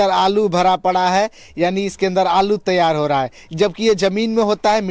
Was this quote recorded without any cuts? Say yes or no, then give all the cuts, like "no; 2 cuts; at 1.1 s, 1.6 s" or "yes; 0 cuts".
yes; 0 cuts